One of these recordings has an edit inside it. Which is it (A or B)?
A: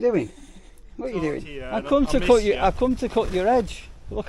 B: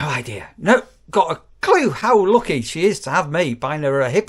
A